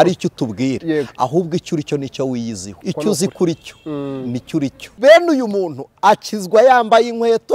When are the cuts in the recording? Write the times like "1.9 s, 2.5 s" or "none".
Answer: 2.7 s, 4.8 s